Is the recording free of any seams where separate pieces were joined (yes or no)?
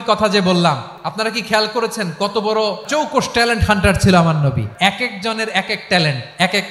no